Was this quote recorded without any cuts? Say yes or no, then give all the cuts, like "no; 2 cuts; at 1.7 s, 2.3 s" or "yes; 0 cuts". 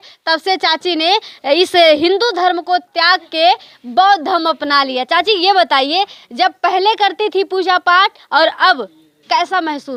yes; 0 cuts